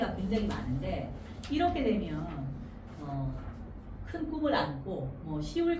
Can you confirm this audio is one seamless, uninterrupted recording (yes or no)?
yes